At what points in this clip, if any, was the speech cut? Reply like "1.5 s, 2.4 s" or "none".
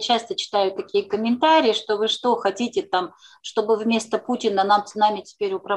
none